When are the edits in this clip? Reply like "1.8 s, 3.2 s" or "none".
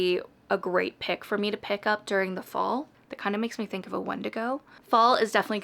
2.9 s, 4.7 s